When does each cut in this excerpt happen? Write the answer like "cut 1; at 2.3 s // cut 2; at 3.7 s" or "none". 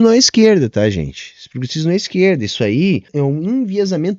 cut 1; at 3.1 s

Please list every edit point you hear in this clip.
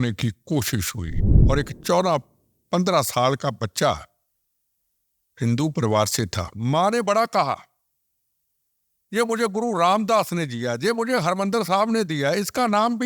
cut 1; at 1.3 s

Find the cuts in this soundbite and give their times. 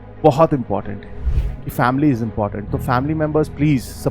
cut 1; at 1.3 s

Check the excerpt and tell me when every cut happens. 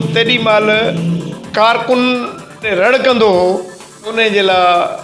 cut 1; at 1.4 s // cut 2; at 2.7 s // cut 3; at 4.1 s

